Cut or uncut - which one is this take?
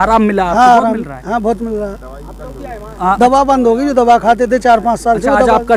uncut